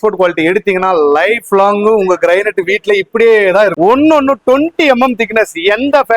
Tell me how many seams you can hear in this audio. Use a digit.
1